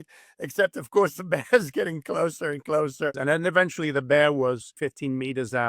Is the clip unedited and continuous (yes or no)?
no